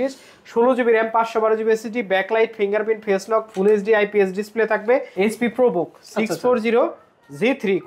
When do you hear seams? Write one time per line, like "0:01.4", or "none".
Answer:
0:05.1